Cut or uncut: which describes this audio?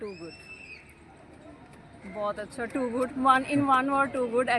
uncut